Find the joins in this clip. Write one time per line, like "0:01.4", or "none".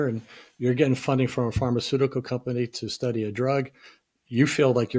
none